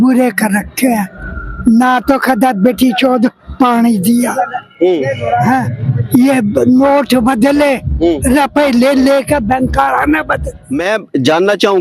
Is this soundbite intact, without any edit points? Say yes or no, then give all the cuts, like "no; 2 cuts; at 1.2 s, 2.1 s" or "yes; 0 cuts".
no; 1 cut; at 10.6 s